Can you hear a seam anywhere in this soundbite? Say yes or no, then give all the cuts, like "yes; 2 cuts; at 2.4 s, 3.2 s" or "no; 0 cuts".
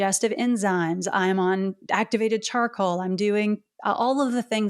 no; 0 cuts